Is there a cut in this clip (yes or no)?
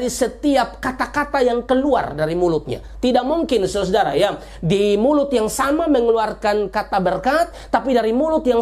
no